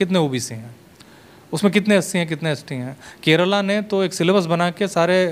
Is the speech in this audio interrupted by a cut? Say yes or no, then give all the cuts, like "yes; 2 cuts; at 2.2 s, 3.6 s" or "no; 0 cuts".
no; 0 cuts